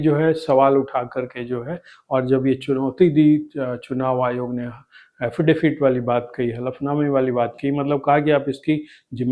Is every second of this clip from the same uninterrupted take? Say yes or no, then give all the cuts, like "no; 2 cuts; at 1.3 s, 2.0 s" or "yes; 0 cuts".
yes; 0 cuts